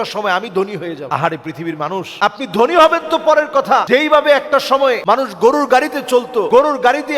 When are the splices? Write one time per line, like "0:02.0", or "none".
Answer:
0:01.0
0:02.1
0:03.8
0:05.0
0:06.5